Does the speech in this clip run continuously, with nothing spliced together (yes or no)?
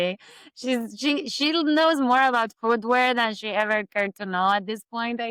yes